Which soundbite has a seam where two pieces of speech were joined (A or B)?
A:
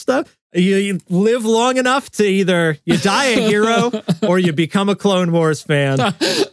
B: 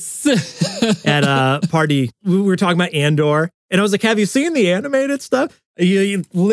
B